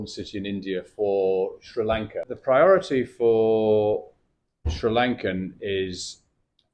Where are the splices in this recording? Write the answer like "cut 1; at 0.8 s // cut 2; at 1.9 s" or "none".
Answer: cut 1; at 2.3 s